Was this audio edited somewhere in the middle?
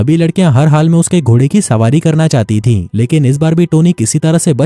no; 0 cuts

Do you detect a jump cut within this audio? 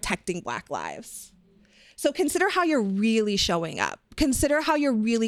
no; 0 cuts

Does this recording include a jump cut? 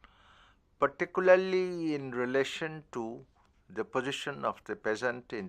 yes; 1 cut; at 3.1 s

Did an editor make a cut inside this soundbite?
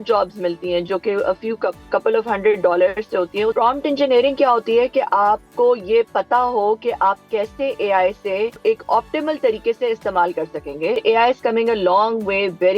yes; 3 cuts; at 3.5 s, 8.6 s, 11.0 s

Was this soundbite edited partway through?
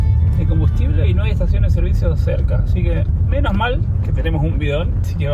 no; 0 cuts

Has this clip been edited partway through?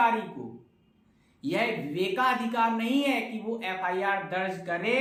no; 0 cuts

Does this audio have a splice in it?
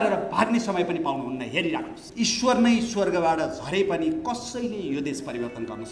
yes; 1 cut; at 2.0 s

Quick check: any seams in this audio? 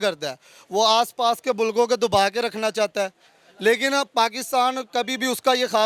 no; 0 cuts

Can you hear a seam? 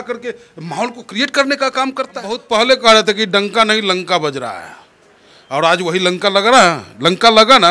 yes; 1 cut; at 2.4 s

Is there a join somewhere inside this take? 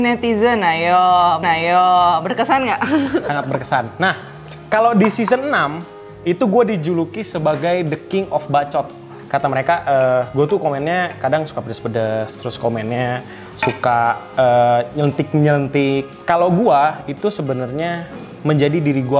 no; 0 cuts

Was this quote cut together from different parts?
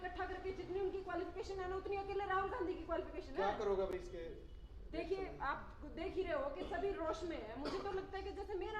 no; 0 cuts

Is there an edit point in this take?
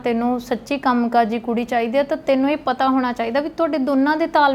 no; 0 cuts

